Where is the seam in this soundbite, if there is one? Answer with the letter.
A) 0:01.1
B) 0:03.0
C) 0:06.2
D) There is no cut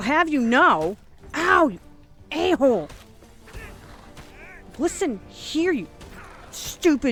D